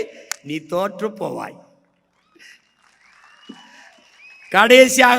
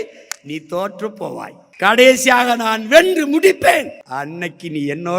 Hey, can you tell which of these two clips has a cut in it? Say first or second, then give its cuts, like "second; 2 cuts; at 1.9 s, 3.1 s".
second; 2 cuts; at 1.6 s, 4.0 s